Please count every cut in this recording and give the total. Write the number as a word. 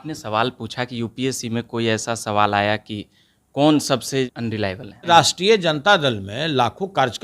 one